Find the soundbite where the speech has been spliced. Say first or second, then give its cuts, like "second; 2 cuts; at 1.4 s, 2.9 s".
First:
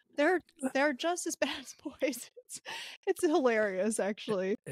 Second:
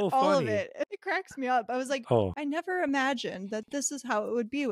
second; 1 cut; at 0.9 s